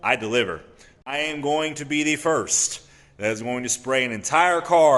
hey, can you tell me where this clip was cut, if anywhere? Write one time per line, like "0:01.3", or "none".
0:01.1

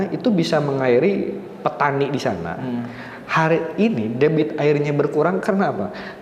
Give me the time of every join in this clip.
none

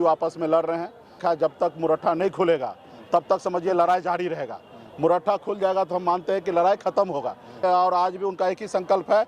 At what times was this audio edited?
0:01.2
0:07.5

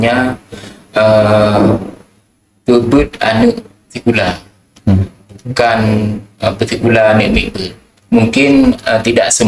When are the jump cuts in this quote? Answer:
0:07.9

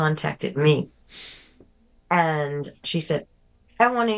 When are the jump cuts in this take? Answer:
0:02.8

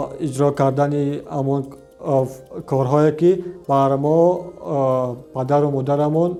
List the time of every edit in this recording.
none

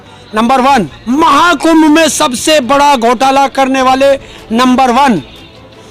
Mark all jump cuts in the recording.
0:01.0

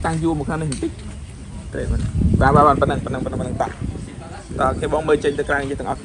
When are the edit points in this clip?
none

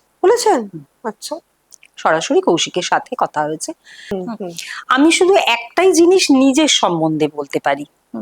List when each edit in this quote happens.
0:04.1

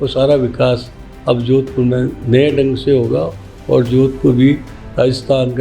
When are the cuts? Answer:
none

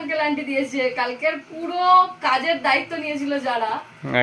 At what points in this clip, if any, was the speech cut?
none

